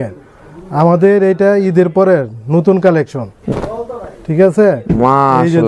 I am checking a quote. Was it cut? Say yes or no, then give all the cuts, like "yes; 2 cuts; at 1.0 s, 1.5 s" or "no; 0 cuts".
yes; 1 cut; at 3.3 s